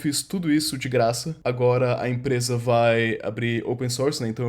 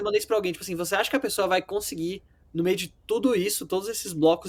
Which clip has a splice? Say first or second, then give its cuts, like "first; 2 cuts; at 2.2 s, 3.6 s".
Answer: first; 1 cut; at 1.3 s